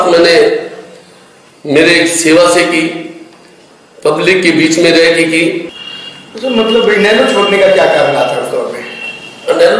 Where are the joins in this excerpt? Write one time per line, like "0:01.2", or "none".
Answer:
0:05.7